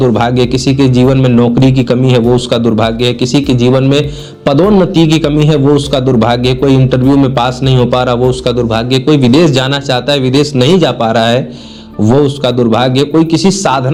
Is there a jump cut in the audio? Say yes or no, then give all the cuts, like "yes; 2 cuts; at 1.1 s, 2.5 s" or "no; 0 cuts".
no; 0 cuts